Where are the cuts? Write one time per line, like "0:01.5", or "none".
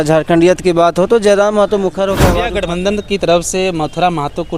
0:02.4